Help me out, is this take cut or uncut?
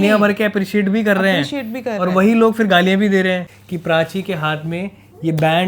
cut